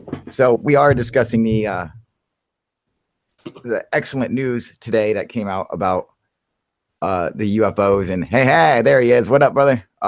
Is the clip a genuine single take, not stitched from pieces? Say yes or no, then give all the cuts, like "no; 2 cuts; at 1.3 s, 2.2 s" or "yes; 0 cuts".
no; 1 cut; at 7.4 s